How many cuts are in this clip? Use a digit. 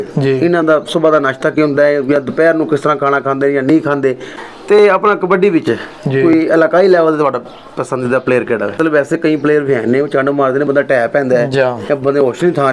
2